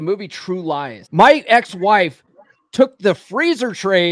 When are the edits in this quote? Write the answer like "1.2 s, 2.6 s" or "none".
1.0 s